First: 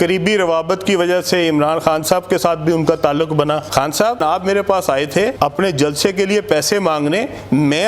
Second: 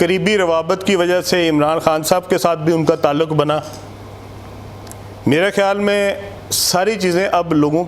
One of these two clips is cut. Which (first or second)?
first